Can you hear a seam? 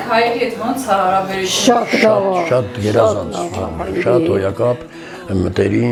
no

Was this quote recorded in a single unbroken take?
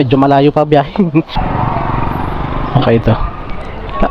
no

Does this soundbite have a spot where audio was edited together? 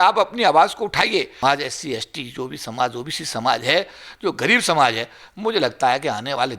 yes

